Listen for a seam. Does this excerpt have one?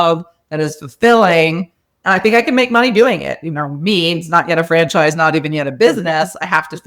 no; 0 cuts

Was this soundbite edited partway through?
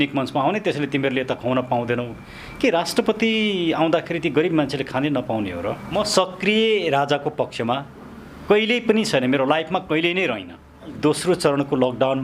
yes; 2 cuts; at 5.9 s, 11.0 s

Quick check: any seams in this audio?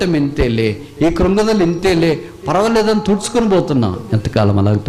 no; 0 cuts

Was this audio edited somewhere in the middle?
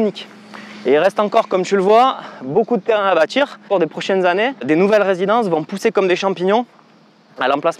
yes; 2 cuts; at 3.7 s, 4.6 s

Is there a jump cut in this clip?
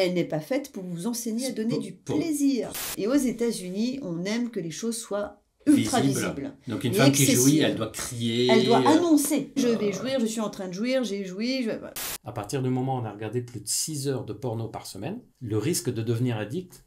yes; 3 cuts; at 2.8 s, 9.6 s, 11.9 s

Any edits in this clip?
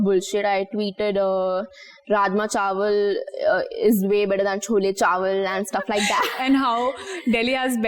no; 0 cuts

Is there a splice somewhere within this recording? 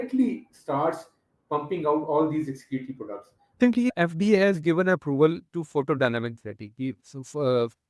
yes; 1 cut; at 3.6 s

